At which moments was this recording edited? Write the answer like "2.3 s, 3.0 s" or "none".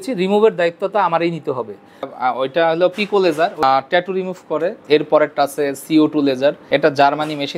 2.0 s, 3.6 s, 4.8 s, 6.6 s